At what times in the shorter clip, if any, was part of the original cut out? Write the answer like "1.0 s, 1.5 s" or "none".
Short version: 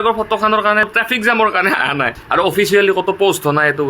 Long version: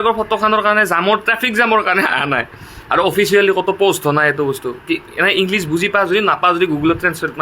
0.9 s, 2.2 s